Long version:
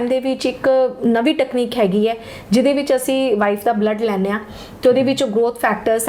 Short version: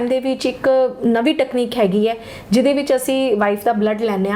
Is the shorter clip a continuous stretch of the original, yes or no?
yes